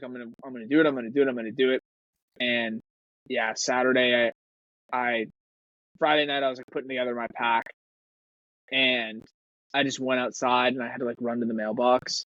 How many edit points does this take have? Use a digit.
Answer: 0